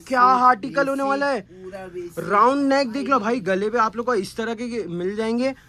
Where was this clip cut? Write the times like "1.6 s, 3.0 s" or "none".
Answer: none

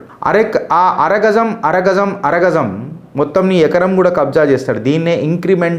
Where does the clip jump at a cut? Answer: none

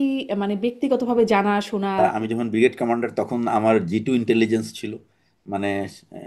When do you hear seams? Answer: 2.0 s

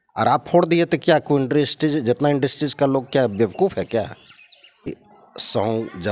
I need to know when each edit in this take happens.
none

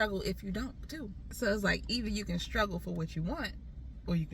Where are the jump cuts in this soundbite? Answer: 1.2 s

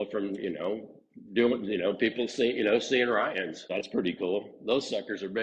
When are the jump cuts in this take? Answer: 3.6 s

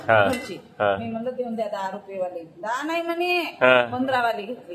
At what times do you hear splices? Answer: none

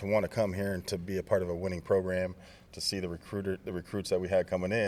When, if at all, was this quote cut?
none

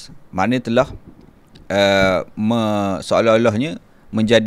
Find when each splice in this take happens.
none

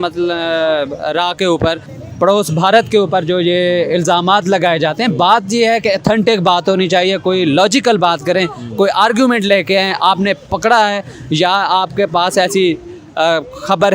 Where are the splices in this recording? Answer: 1.9 s

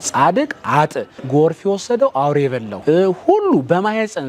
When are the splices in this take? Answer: 1.1 s, 2.7 s

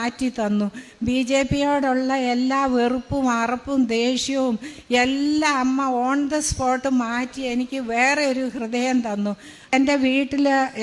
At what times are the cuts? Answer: 9.7 s

